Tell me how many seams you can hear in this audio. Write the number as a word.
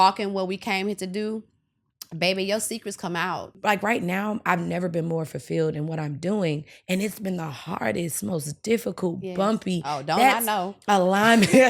one